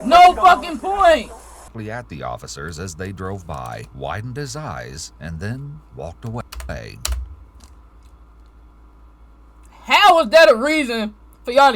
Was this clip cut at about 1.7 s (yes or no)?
yes